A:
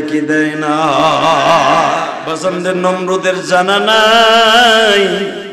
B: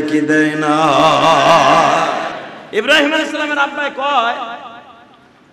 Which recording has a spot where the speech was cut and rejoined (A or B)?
A